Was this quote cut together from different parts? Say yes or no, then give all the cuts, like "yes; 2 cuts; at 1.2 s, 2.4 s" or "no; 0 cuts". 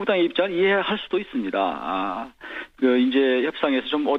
no; 0 cuts